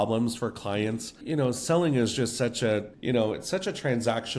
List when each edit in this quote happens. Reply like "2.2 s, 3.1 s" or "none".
1.1 s, 2.9 s